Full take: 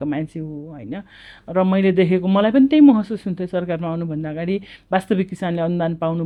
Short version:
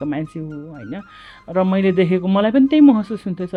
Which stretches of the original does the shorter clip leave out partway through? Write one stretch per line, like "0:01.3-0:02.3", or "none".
none